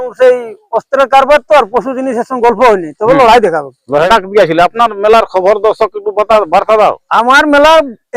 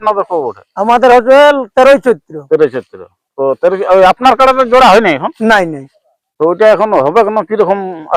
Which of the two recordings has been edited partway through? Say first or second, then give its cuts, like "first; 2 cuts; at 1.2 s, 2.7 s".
first; 1 cut; at 4.1 s